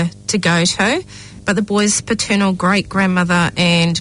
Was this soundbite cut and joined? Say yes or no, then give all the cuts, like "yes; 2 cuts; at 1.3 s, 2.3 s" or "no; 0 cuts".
no; 0 cuts